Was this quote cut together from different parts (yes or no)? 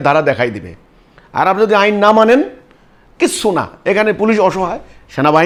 no